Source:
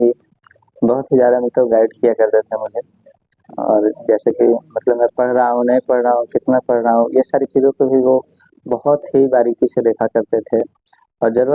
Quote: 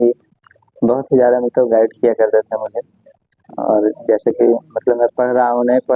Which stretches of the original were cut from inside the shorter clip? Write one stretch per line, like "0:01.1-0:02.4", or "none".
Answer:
none